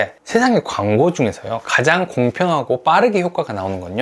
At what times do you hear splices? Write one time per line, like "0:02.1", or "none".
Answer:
none